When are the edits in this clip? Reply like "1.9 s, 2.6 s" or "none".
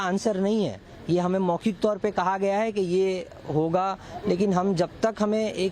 none